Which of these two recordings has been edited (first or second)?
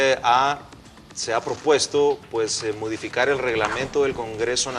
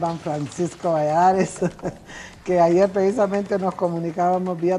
first